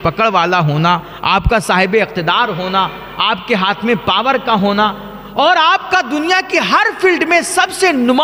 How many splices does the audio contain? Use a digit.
0